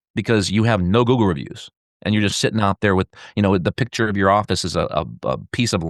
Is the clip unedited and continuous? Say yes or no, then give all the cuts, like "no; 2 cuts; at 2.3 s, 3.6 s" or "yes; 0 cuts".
yes; 0 cuts